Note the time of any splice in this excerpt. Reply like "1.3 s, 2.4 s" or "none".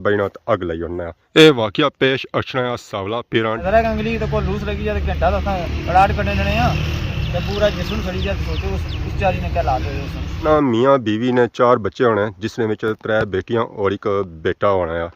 1.1 s, 3.6 s, 10.4 s